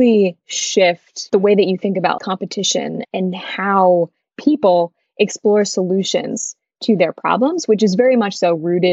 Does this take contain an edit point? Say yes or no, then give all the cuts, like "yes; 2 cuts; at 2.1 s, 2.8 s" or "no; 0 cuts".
yes; 2 cuts; at 1.1 s, 2.2 s